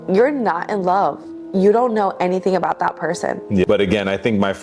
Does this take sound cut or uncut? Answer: cut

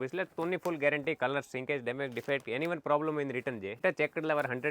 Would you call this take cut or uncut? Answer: cut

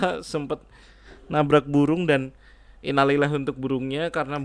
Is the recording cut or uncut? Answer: uncut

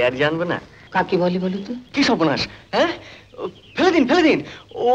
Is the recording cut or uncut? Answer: cut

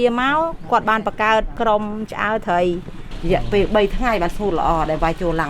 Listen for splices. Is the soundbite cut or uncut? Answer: cut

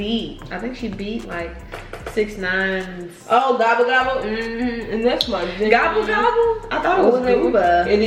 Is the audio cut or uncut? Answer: uncut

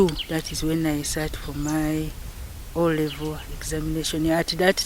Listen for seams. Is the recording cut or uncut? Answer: uncut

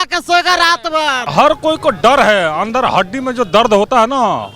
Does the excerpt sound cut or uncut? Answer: cut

